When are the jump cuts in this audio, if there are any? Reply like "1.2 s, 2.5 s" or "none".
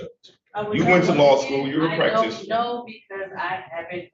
none